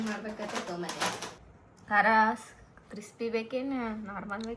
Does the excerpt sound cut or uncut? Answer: cut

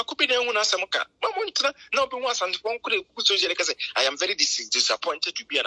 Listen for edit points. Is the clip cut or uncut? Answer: uncut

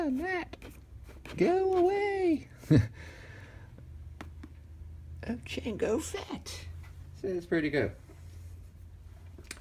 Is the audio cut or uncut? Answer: uncut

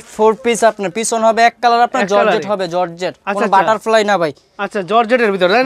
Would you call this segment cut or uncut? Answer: uncut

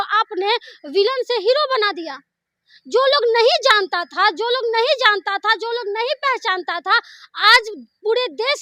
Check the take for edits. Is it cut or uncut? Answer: uncut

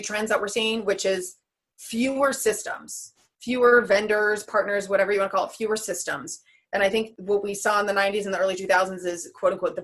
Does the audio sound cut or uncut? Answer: cut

